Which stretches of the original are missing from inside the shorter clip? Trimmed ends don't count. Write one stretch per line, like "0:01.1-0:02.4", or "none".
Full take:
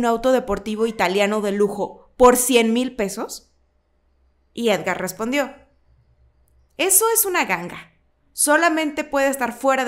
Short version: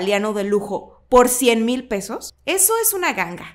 0:03.4-0:06.6

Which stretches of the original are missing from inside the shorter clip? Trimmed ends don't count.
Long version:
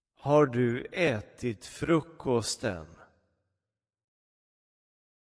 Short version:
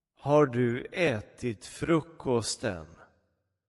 none

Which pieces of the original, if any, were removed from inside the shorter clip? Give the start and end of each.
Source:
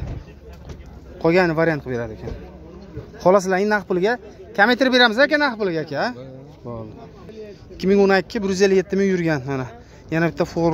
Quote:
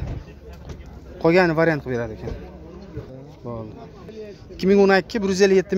0:03.1-0:06.3

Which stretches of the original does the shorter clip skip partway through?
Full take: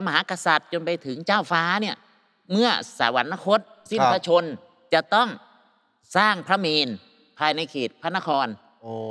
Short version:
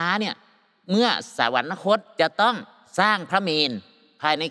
0:03.7-0:04.8
0:05.5-0:05.9

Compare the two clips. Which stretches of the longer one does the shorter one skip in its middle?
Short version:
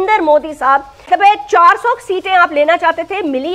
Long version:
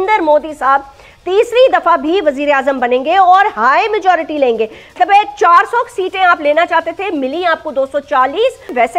0:00.9-0:04.8

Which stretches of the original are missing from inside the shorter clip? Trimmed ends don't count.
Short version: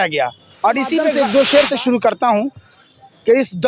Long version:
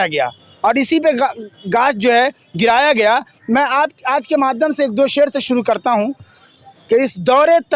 0:01.2-0:04.8

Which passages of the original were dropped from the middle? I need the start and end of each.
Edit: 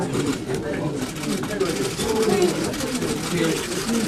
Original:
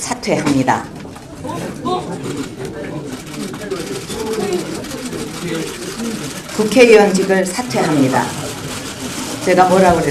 none

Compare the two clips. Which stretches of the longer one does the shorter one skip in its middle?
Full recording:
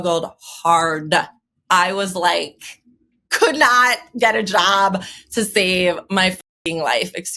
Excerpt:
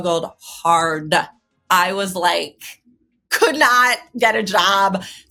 none

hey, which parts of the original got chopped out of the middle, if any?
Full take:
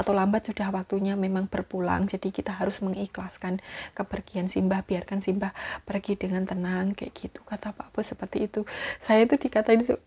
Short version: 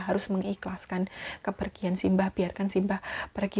none

